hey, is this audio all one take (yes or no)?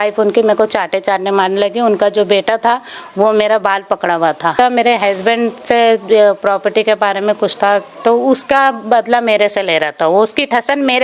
no